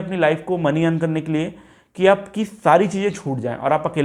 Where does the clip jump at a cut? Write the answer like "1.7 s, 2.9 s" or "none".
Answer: none

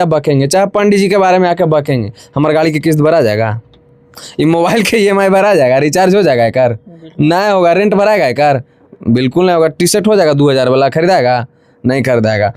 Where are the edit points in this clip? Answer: none

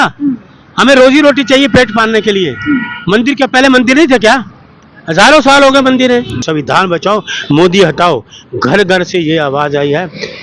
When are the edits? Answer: 6.4 s

